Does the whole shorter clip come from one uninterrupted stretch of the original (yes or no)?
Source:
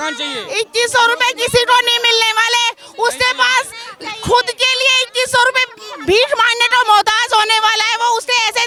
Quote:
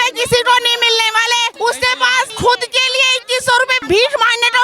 no